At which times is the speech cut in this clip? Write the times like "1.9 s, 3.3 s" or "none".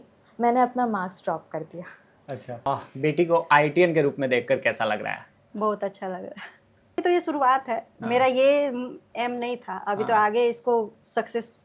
2.7 s, 7.0 s

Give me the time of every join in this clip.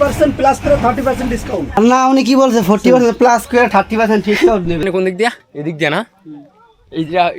1.8 s, 4.8 s

